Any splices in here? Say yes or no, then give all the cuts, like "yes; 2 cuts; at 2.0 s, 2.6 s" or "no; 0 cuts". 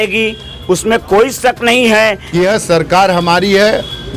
yes; 1 cut; at 2.2 s